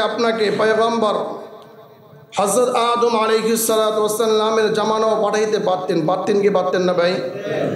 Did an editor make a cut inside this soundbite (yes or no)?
no